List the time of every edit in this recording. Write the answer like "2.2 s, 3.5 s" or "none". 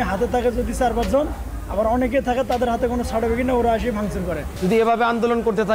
4.6 s

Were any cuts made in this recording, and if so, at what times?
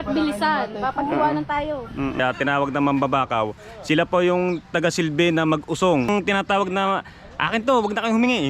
2.2 s, 6.1 s

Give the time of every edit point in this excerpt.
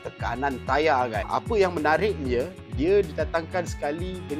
1.2 s

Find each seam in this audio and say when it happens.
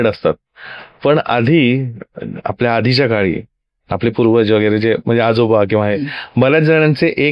none

